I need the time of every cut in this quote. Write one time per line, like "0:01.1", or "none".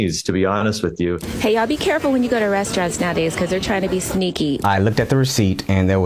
0:01.2
0:04.6